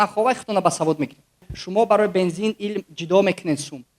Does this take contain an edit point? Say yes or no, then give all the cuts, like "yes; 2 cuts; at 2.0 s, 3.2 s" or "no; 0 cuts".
yes; 1 cut; at 1.6 s